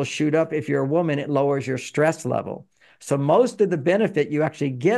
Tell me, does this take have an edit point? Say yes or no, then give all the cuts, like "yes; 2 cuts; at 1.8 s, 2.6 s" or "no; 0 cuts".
no; 0 cuts